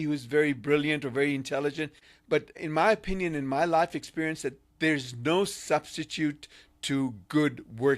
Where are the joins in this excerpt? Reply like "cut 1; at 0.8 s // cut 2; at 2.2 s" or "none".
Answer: cut 1; at 2.1 s